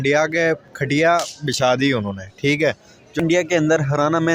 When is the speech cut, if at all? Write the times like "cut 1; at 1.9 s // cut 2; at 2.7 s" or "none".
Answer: cut 1; at 3.2 s